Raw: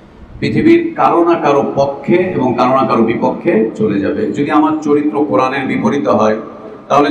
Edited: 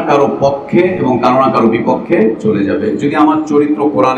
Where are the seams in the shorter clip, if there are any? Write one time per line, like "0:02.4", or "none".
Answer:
none